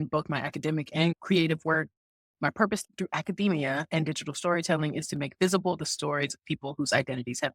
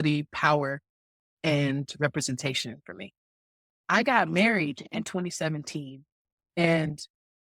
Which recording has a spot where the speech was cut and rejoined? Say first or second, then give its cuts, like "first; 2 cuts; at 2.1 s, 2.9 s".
second; 1 cut; at 3.7 s